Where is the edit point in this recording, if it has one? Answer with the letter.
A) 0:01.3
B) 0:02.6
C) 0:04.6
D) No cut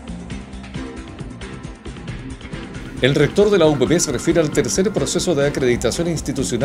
A